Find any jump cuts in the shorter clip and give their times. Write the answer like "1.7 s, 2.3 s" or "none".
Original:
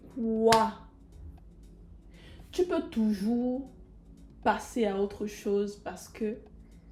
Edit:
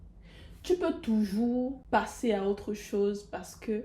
1.8 s